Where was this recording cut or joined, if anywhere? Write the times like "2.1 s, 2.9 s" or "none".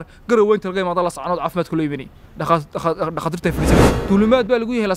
3.9 s